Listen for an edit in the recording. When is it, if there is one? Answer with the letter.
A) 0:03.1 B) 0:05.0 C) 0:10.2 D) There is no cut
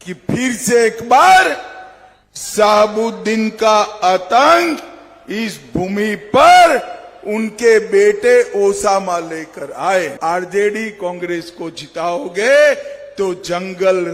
C